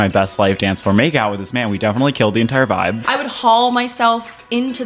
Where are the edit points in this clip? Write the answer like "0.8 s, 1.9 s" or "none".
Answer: 3.0 s